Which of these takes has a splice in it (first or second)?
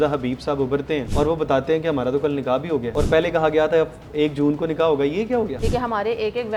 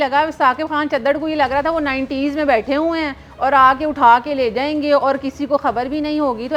first